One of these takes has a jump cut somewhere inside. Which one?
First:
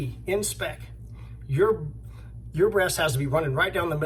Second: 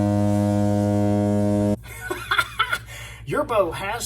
second; 1 cut; at 1.9 s

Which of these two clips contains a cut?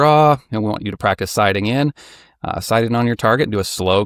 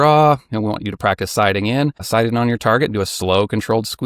second; 1 cut; at 2.0 s

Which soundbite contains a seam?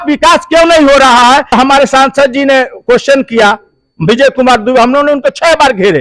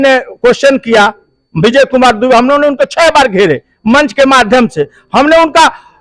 first; 1 cut; at 1.5 s

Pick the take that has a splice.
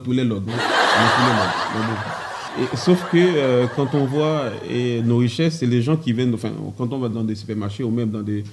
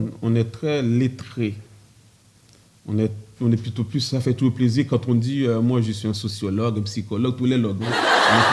first; 1 cut; at 2.4 s

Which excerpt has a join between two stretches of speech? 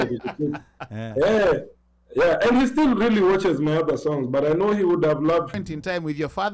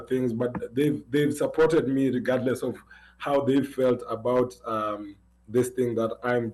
first; 1 cut; at 5.5 s

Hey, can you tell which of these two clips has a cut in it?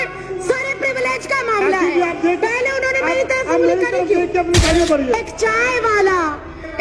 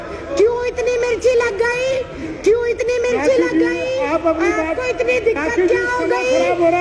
first; 1 cut; at 4.6 s

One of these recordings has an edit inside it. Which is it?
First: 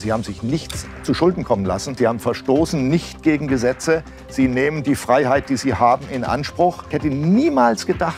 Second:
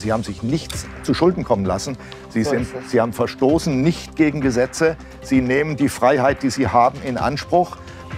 first; 2 cuts; at 1.9 s, 6.9 s

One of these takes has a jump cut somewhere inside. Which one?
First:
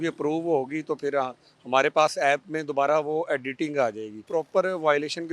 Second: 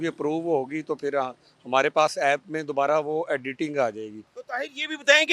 first; 1 cut; at 4.2 s

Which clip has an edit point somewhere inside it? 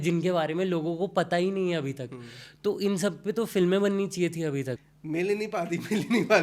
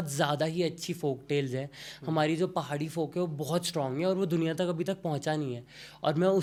first; 1 cut; at 4.8 s

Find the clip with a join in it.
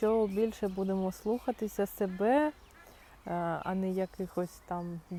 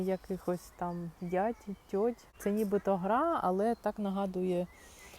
second; 1 cut; at 2.3 s

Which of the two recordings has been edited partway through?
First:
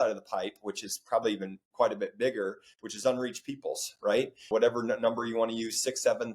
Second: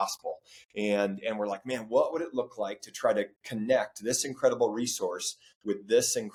first; 1 cut; at 4.5 s

